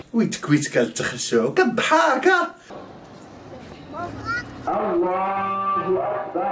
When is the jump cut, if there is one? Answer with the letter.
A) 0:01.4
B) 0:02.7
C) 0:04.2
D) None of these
B